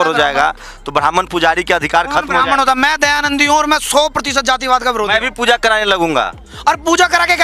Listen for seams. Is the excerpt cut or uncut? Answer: cut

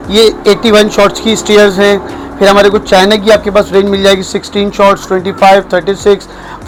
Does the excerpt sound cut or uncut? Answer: uncut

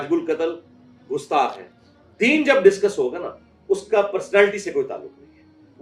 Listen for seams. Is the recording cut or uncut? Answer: cut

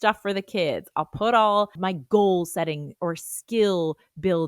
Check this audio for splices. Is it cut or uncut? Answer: cut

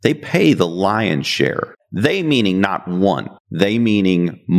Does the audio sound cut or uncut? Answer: uncut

